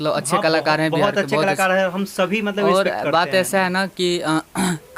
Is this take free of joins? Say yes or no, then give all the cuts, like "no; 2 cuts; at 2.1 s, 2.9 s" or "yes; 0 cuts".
yes; 0 cuts